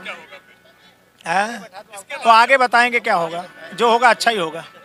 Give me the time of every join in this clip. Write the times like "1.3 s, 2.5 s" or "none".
none